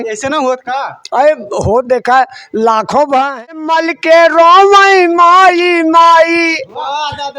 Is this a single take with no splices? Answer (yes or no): no